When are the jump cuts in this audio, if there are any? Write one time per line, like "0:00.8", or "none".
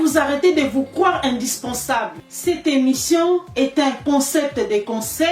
0:02.2